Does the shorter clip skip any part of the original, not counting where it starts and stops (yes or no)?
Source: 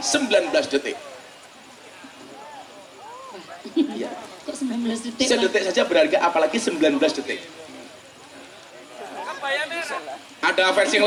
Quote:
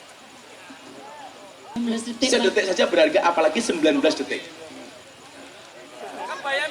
yes